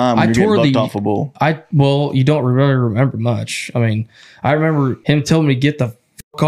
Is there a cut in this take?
yes; 1 cut; at 5.0 s

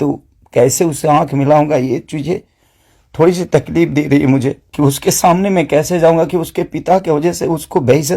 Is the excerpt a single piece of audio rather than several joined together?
no; 1 cut; at 4.6 s

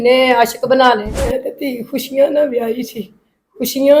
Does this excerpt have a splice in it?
yes; 1 cut; at 1.1 s

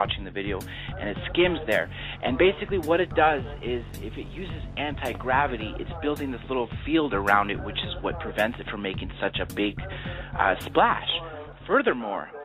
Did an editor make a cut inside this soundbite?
no; 0 cuts

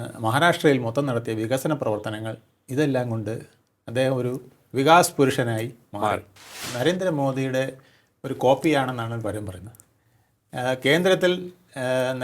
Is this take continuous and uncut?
no; 1 cut; at 6.6 s

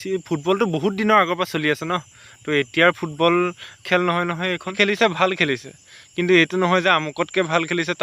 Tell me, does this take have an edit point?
yes; 1 cut; at 4.7 s

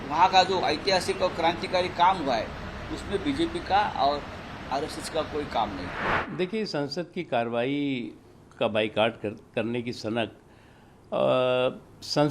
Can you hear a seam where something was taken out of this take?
yes; 1 cut; at 6.2 s

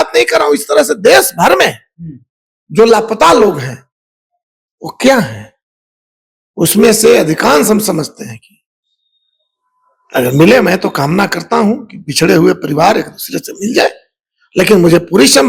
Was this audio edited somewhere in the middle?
no; 0 cuts

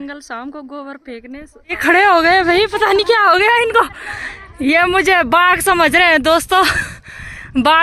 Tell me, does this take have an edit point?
yes; 1 cut; at 1.8 s

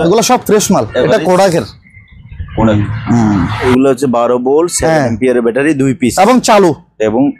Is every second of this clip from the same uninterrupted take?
no; 1 cut; at 3.5 s

